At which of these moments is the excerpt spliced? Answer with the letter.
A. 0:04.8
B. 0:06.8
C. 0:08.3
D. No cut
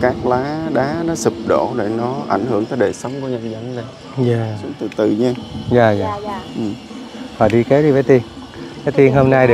A